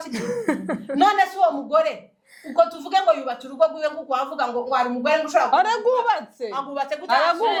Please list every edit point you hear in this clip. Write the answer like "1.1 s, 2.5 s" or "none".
none